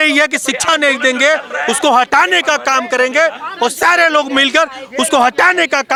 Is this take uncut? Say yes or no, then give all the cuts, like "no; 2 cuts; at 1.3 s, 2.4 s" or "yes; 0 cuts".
yes; 0 cuts